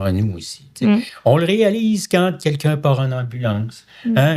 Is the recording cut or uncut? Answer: cut